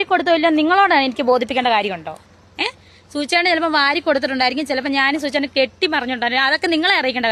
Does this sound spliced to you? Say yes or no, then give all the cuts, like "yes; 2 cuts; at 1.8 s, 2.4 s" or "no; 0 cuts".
no; 0 cuts